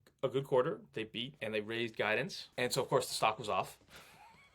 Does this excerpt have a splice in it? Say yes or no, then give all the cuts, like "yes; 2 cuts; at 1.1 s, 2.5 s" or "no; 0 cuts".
yes; 2 cuts; at 1.4 s, 2.4 s